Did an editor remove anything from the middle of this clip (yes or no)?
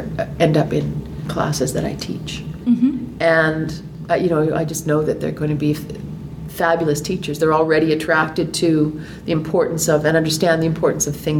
no